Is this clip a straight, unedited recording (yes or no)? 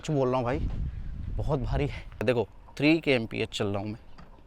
no